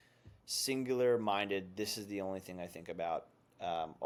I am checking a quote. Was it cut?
no; 0 cuts

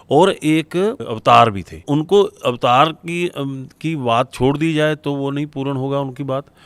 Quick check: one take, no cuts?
no; 2 cuts; at 1.1 s, 1.8 s

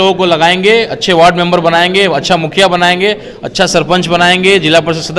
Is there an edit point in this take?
no; 0 cuts

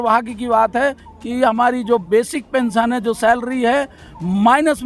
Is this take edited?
no; 0 cuts

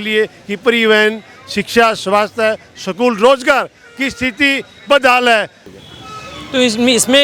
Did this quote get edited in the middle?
yes; 1 cut; at 5.7 s

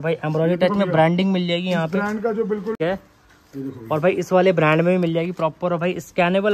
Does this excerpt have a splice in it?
yes; 1 cut; at 2.8 s

